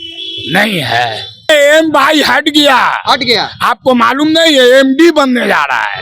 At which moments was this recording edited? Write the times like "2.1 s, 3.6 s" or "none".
1.5 s

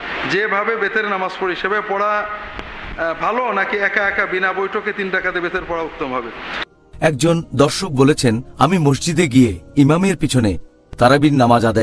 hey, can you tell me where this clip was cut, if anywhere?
6.6 s

